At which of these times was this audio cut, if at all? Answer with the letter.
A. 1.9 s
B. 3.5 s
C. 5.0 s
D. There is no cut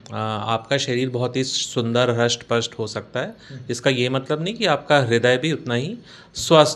D